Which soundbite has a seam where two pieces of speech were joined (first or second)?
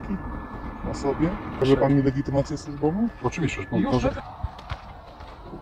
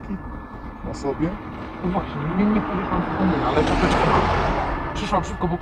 first